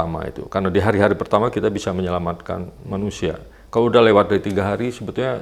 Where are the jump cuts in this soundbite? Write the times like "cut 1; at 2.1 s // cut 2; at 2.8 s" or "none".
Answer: none